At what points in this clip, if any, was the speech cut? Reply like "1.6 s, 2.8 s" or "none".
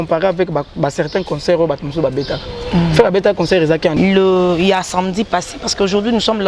3.9 s